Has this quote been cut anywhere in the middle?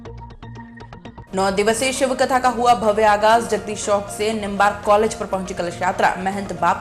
yes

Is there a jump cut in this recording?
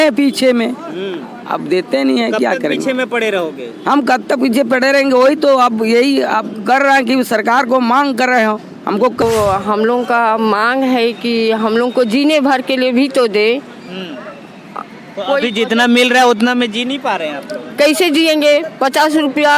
yes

